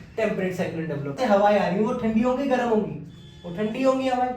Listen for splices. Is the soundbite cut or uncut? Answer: cut